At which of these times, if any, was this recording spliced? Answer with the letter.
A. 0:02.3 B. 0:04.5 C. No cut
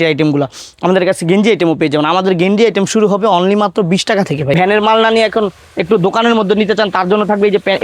B